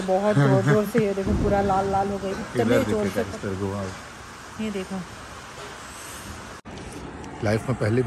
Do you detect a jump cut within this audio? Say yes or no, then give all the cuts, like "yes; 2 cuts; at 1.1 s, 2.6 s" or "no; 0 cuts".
yes; 1 cut; at 6.6 s